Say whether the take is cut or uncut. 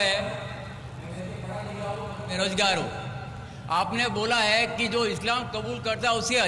uncut